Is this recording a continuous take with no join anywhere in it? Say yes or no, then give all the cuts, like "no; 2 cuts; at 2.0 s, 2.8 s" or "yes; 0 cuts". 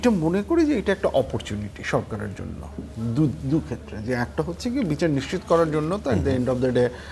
yes; 0 cuts